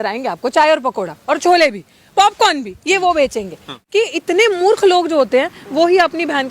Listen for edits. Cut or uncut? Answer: cut